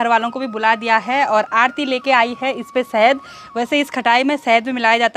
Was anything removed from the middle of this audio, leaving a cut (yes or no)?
no